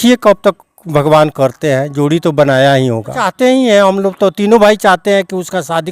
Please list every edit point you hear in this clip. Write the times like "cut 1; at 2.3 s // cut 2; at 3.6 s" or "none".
cut 1; at 3.2 s